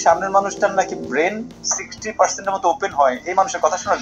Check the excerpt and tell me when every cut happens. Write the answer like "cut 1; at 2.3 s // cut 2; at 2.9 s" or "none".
none

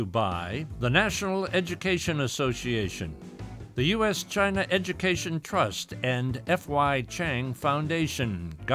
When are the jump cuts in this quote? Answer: none

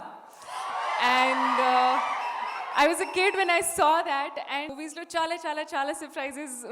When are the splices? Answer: cut 1; at 4.7 s

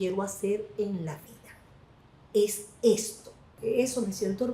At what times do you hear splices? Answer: cut 1; at 3.5 s

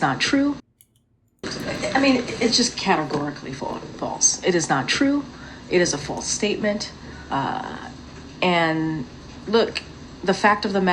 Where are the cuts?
cut 1; at 0.9 s // cut 2; at 9.6 s

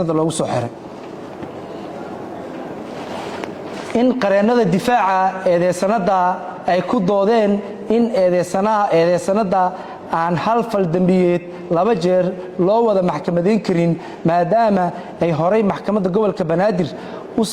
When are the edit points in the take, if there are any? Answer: none

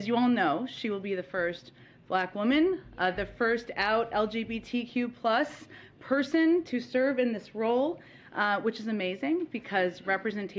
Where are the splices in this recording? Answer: none

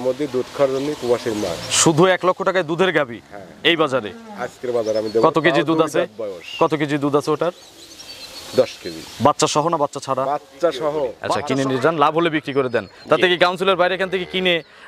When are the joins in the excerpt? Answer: cut 1; at 11.3 s

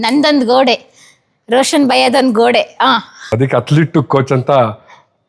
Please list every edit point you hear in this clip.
none

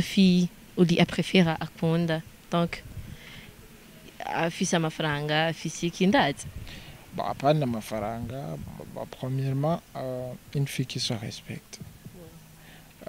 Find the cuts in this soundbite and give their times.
none

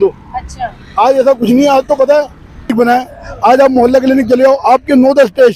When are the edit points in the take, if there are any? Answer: cut 1; at 2.7 s

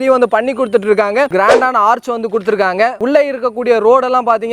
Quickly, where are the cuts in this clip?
cut 1; at 1.3 s // cut 2; at 3.0 s

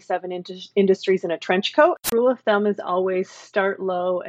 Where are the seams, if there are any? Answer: cut 1; at 2.1 s

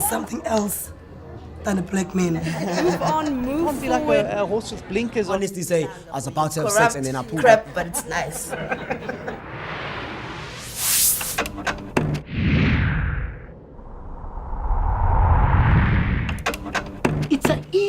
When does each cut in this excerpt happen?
cut 1; at 7.1 s

